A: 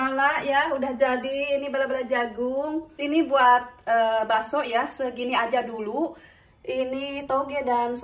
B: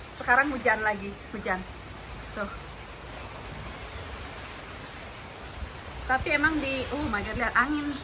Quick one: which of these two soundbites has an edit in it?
A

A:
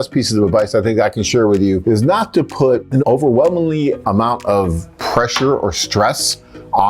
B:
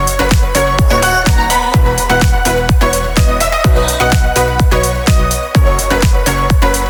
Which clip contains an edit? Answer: A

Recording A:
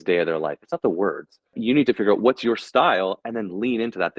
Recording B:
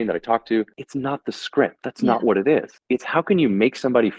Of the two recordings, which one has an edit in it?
A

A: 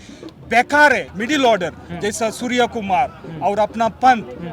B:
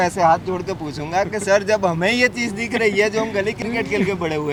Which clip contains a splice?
A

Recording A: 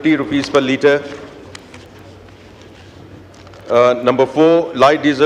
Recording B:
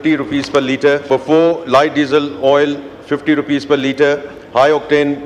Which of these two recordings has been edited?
B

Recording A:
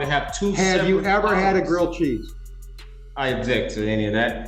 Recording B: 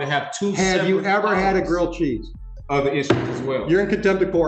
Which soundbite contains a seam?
B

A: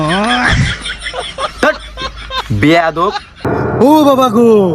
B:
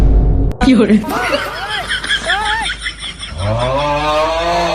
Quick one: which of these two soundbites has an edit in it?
A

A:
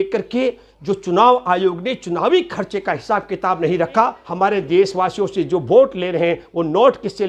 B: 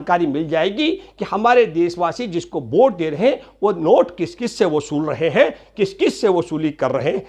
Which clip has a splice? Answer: A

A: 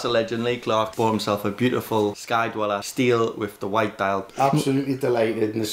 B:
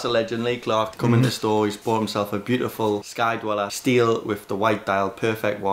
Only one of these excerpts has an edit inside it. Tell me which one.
A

